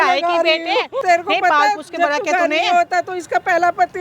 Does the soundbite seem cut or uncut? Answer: cut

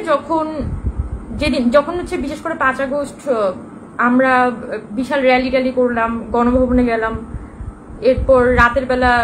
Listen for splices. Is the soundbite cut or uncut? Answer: uncut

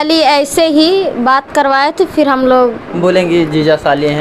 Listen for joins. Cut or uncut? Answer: uncut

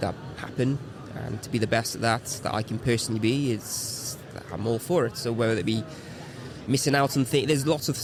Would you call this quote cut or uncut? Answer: uncut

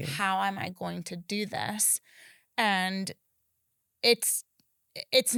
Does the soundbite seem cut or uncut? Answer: uncut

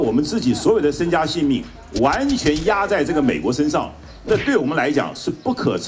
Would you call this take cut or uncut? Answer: uncut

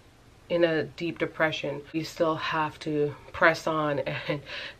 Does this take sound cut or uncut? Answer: cut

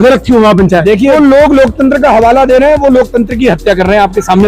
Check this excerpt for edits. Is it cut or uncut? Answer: cut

